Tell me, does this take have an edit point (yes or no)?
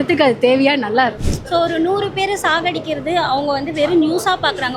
yes